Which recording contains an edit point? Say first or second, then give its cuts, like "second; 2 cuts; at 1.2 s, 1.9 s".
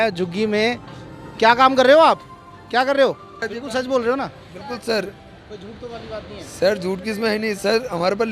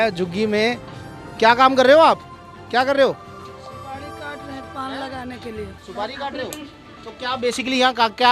first; 1 cut; at 3.4 s